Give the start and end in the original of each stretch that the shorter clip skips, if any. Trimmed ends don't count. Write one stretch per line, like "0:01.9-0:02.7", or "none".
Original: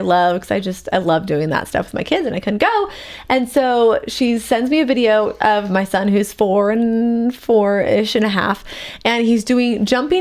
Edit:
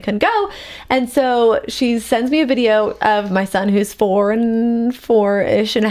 none